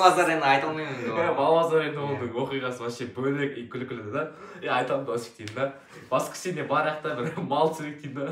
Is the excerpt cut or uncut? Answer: uncut